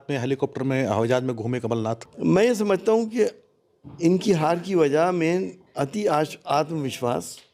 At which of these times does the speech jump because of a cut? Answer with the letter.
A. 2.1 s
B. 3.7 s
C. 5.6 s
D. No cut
A